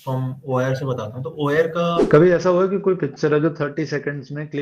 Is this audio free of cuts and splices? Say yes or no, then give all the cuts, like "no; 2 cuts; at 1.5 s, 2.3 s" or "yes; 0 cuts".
no; 1 cut; at 2.0 s